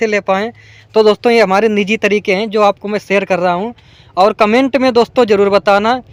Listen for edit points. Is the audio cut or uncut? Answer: uncut